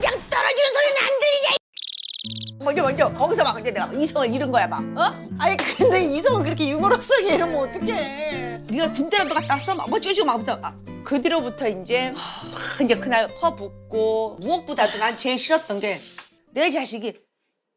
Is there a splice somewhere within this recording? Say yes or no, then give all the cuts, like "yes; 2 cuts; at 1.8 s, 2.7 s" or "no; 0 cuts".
no; 0 cuts